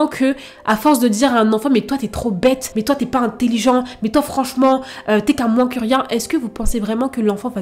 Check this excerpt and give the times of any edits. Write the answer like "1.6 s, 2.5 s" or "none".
none